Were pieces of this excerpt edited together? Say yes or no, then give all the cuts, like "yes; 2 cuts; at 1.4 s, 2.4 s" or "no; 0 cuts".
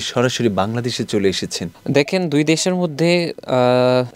no; 0 cuts